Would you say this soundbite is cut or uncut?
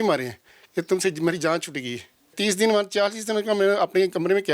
cut